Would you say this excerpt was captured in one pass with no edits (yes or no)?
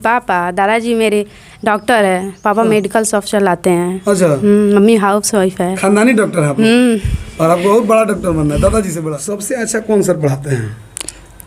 no